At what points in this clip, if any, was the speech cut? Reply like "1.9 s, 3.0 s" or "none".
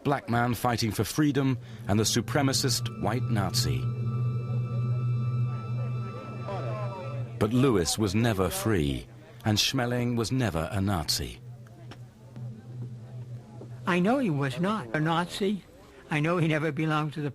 14.6 s